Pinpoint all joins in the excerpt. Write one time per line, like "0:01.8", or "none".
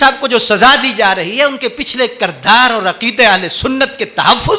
none